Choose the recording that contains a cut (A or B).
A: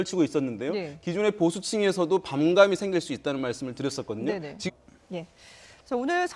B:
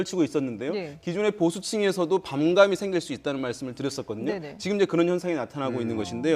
B